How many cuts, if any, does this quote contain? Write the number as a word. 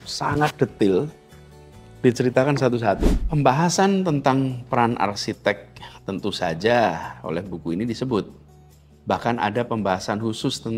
one